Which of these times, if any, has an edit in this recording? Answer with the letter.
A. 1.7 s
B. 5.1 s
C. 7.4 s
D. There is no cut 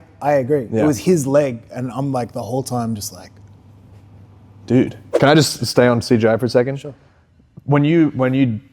B